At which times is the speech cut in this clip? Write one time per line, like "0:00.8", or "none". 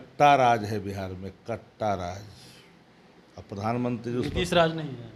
none